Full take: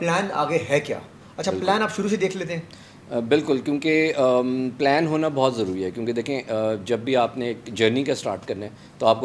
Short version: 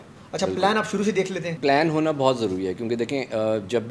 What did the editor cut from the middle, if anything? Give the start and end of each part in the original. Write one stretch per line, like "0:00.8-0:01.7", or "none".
0:02.6-0:04.7